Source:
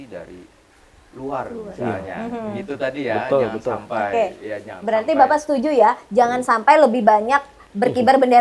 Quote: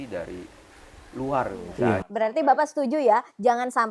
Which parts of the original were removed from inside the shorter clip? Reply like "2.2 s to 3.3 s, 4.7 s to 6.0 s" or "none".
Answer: 2.1 s to 4.8 s